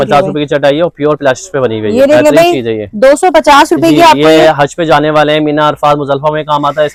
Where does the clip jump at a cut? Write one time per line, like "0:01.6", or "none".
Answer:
none

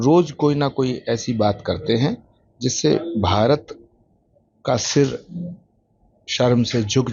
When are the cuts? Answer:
none

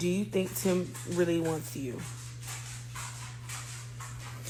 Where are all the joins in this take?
none

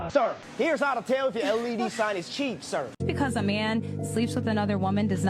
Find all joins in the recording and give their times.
0:02.9

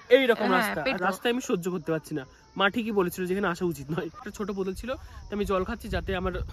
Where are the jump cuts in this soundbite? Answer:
0:01.0
0:04.3

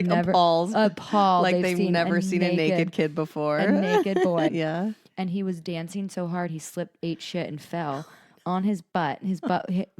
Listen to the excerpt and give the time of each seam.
0:04.5

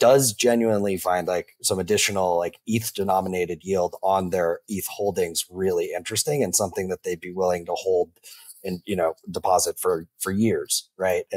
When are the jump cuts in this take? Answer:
0:01.5

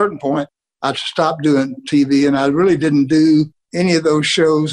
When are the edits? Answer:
none

